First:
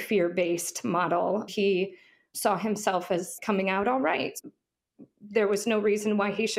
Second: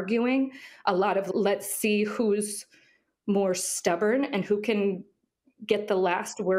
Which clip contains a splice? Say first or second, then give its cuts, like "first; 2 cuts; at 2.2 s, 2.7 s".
first; 2 cuts; at 1.5 s, 4.4 s